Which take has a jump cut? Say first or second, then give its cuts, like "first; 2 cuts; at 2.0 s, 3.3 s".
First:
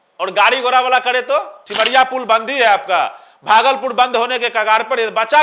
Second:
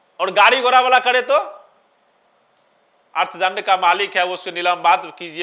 first; 1 cut; at 1.6 s